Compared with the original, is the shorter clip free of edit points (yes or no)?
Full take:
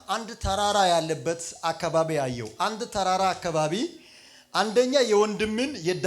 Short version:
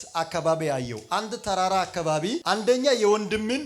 no